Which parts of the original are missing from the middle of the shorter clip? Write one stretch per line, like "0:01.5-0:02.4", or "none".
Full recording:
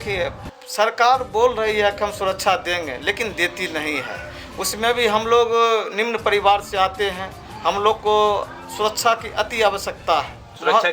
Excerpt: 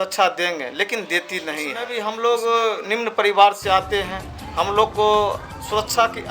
0:04.1-0:04.9